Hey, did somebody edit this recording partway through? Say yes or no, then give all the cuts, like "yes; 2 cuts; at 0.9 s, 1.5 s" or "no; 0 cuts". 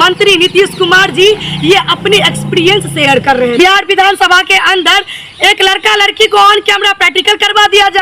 yes; 1 cut; at 3.6 s